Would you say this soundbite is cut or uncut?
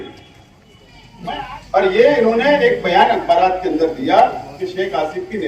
cut